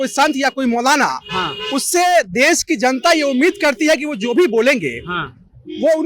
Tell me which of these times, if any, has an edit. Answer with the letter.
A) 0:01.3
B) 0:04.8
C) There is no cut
C